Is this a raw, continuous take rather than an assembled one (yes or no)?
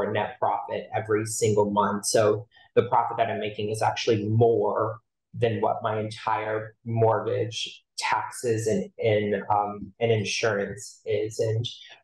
yes